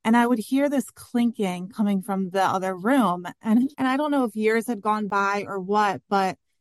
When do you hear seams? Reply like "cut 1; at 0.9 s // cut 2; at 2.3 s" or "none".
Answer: none

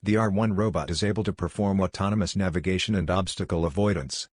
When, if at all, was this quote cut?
cut 1; at 1.0 s

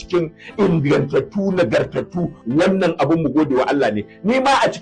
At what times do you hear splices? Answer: cut 1; at 2.3 s

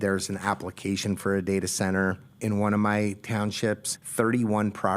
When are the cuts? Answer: cut 1; at 2.3 s // cut 2; at 3.9 s

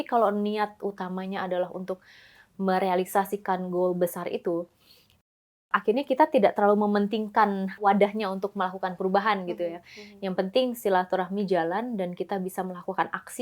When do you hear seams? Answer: cut 1; at 7.8 s

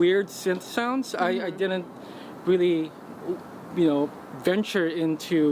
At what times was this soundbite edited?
none

